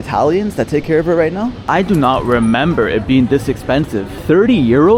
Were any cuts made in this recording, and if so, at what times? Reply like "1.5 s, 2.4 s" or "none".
1.6 s